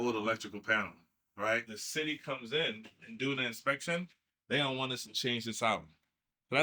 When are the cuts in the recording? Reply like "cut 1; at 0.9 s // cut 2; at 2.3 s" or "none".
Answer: cut 1; at 1.8 s